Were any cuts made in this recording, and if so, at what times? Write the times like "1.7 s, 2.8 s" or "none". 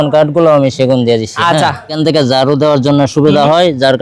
1.9 s